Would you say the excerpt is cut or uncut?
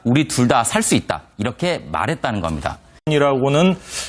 uncut